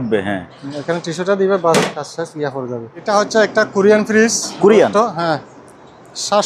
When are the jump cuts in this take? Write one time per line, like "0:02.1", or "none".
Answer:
0:03.0